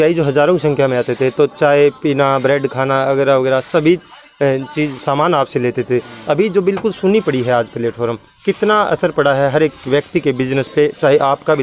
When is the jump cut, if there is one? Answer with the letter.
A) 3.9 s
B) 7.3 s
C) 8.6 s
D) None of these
D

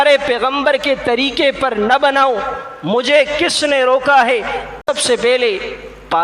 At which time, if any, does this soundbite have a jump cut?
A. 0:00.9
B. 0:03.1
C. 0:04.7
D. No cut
C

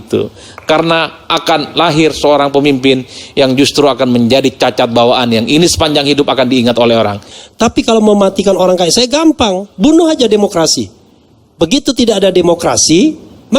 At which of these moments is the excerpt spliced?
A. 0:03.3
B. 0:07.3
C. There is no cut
B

